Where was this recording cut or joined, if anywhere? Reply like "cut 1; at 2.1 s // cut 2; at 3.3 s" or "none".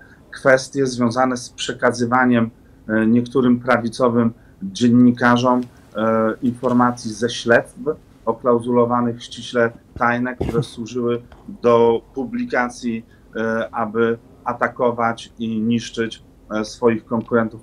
none